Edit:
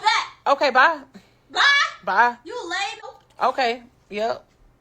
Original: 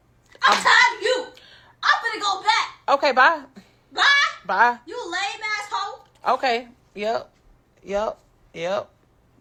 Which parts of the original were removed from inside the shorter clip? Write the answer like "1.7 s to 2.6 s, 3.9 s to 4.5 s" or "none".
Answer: 5.5 s to 6.0 s